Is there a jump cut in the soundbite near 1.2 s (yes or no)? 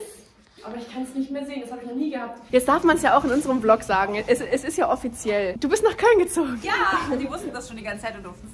no